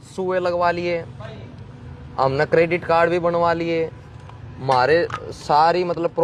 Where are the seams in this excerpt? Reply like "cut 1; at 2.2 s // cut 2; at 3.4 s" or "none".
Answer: none